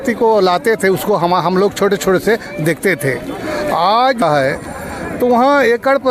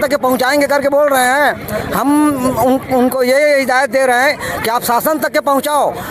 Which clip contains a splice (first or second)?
first